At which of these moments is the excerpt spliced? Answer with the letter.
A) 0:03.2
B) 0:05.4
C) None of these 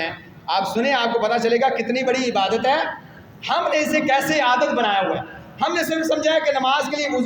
C